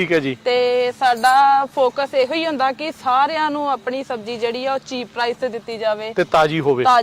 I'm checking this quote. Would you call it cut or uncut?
uncut